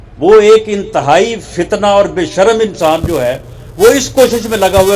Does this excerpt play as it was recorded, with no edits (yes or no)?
yes